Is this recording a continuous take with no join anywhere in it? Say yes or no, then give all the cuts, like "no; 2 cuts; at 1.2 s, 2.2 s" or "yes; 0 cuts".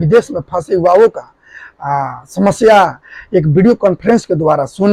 yes; 0 cuts